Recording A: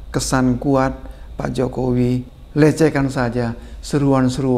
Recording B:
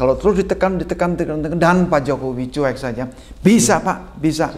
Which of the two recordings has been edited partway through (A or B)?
A